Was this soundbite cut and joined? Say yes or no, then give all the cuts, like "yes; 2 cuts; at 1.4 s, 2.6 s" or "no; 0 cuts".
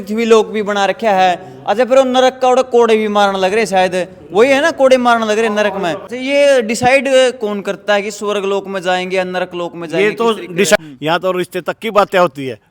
yes; 2 cuts; at 6.1 s, 10.8 s